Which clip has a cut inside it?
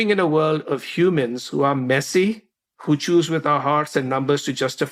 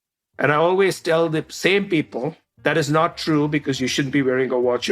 second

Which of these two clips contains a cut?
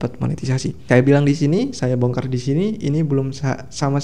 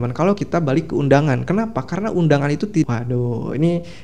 second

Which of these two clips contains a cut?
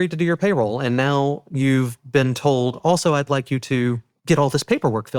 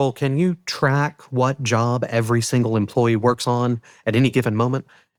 first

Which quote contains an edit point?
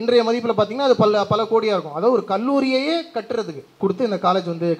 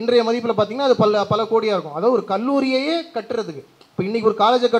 first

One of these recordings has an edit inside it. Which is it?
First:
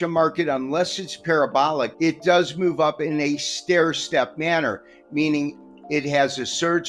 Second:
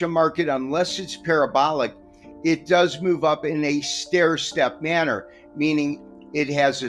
first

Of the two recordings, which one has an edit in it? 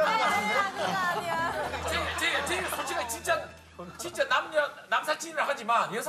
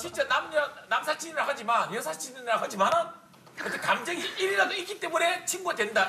first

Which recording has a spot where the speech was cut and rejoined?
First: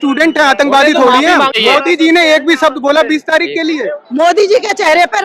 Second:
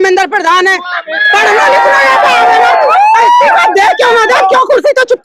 first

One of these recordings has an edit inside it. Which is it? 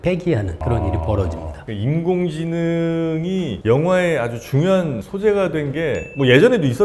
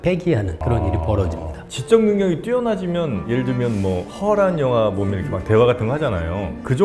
second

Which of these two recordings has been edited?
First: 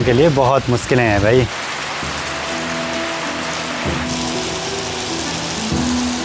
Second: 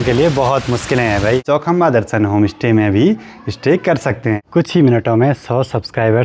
second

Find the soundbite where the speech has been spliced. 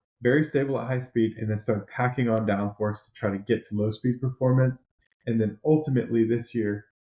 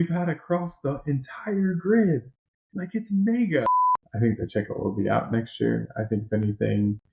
second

